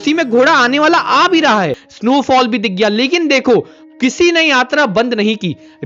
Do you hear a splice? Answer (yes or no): yes